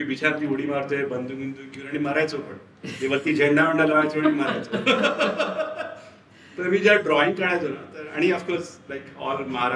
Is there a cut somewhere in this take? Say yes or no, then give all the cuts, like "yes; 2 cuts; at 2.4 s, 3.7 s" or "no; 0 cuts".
no; 0 cuts